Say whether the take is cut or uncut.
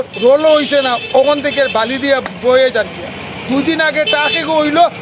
uncut